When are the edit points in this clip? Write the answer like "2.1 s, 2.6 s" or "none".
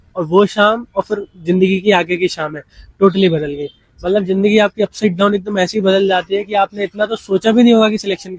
none